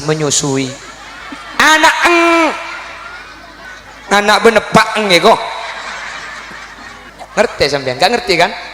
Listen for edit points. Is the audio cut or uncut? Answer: cut